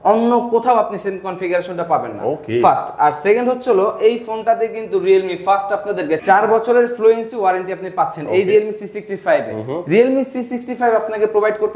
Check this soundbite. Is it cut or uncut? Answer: uncut